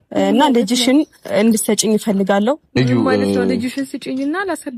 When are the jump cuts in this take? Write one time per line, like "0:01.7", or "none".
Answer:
0:02.7